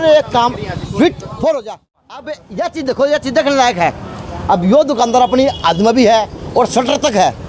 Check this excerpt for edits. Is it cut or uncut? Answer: cut